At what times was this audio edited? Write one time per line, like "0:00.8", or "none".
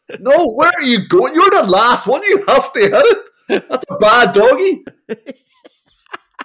0:05.0